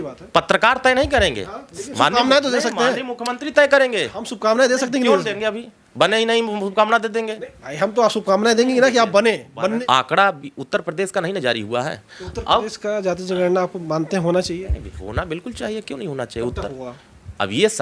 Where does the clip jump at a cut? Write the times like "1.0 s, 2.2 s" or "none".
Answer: 9.8 s